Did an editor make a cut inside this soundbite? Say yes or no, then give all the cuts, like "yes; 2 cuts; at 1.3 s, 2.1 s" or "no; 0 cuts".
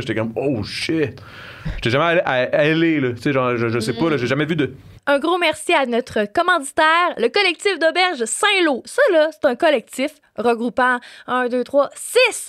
no; 0 cuts